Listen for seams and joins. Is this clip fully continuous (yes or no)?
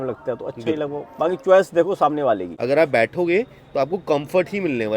no